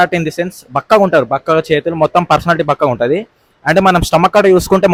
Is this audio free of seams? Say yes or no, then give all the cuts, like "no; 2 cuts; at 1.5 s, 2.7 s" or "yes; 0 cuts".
yes; 0 cuts